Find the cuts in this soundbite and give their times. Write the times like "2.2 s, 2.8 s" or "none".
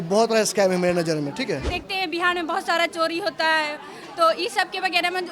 1.8 s